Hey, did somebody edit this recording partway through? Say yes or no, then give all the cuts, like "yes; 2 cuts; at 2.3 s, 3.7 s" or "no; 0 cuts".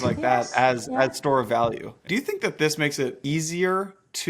yes; 2 cuts; at 2.0 s, 3.2 s